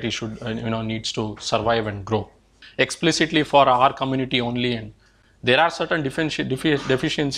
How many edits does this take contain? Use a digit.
1